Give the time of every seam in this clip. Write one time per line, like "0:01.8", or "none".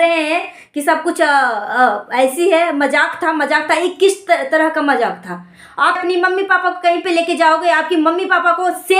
0:06.0

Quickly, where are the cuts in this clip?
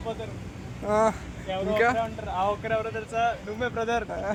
none

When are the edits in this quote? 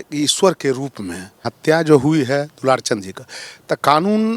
0:01.5

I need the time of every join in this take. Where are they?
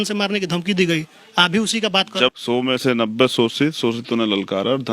0:02.3

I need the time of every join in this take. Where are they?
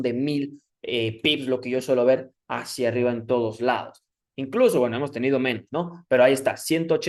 none

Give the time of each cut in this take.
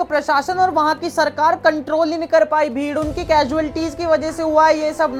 none

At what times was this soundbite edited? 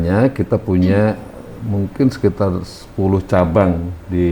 none

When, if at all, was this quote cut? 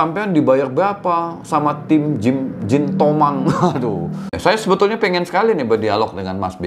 0:04.4

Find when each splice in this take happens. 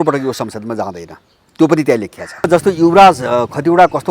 0:02.5

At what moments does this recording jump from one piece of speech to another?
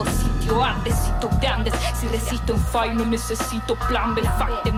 none

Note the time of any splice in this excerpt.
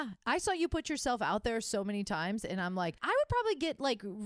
none

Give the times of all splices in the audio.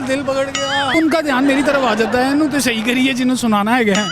0:00.9

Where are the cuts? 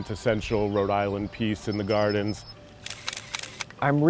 0:02.4

